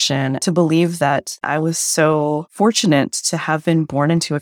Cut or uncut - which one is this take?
cut